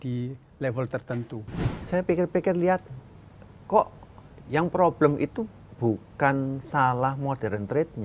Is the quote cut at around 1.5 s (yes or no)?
yes